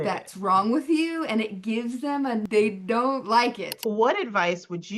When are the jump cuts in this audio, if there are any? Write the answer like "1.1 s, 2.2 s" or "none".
2.5 s, 3.8 s